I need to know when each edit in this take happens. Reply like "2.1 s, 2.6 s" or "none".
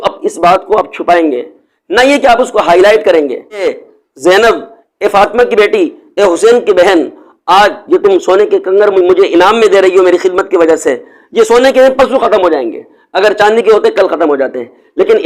3.7 s